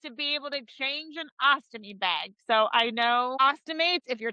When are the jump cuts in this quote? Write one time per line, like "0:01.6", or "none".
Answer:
0:03.3